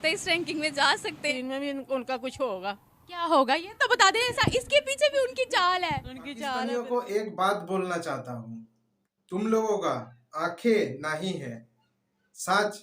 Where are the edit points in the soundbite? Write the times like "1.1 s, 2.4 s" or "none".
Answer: 1.3 s, 6.6 s